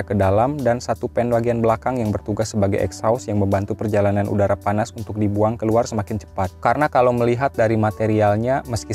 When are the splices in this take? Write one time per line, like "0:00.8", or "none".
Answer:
none